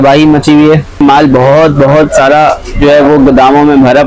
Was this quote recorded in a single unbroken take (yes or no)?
no